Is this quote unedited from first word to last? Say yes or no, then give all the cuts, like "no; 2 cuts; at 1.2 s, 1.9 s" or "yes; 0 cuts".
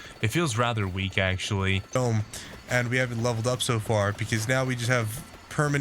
no; 1 cut; at 2.0 s